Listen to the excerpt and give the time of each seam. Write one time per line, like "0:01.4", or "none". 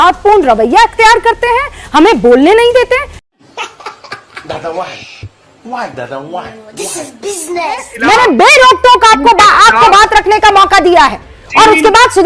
0:07.9